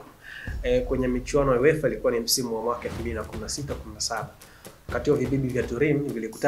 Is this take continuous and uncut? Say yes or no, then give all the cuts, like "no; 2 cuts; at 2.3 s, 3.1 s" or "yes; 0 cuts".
yes; 0 cuts